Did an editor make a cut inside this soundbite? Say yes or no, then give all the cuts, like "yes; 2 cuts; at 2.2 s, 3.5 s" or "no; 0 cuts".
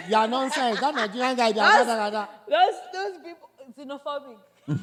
no; 0 cuts